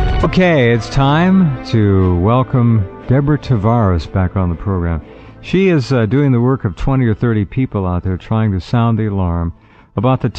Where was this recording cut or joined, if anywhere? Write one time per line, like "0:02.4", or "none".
0:05.9